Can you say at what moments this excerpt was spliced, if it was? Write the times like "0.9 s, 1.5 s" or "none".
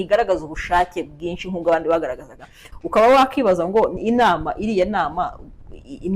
2.6 s